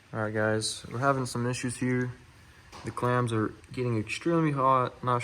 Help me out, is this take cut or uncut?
cut